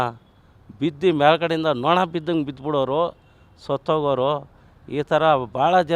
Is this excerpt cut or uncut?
uncut